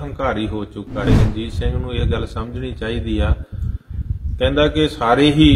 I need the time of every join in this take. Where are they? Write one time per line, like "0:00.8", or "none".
0:01.1